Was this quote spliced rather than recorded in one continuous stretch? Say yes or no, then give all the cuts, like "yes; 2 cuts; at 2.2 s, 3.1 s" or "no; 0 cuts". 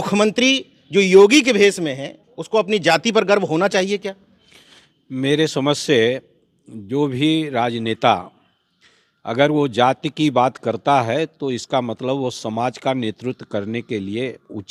no; 0 cuts